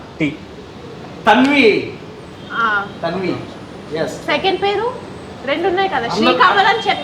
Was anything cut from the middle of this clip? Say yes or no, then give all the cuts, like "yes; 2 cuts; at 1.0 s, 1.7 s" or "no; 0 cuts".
no; 0 cuts